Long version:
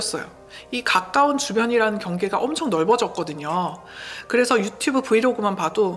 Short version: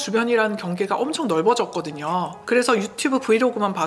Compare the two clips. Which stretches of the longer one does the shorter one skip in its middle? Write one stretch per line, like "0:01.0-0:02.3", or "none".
0:03.8-0:04.2

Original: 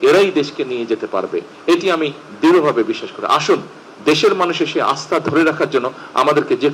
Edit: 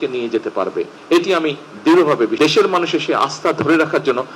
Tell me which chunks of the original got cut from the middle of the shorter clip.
0:02.9-0:04.0

